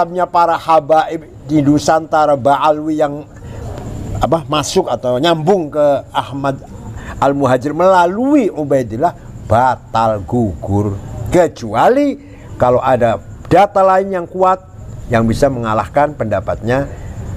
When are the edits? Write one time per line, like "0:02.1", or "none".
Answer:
none